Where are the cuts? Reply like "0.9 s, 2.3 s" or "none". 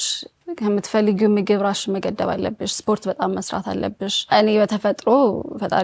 4.3 s